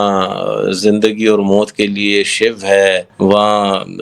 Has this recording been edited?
yes; 1 cut; at 3.1 s

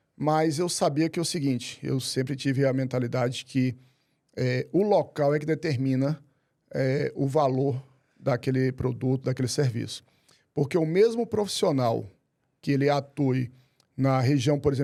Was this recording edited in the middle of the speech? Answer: no; 0 cuts

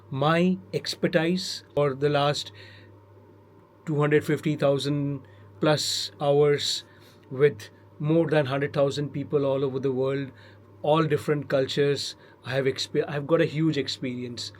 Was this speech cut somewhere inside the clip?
yes; 1 cut; at 1.8 s

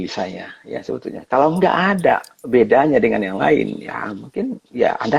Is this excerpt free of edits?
yes; 0 cuts

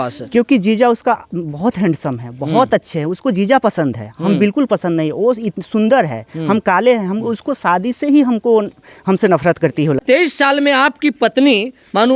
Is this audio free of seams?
no; 1 cut; at 10.0 s

